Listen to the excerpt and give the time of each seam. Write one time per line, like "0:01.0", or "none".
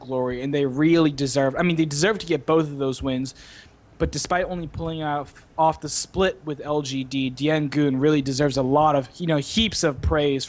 0:01.1